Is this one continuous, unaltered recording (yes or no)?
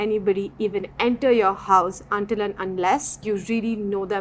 yes